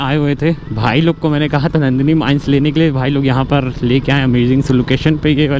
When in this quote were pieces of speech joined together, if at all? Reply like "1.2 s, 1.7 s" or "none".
none